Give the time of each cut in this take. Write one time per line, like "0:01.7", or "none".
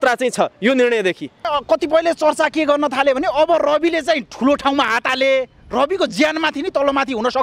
0:01.5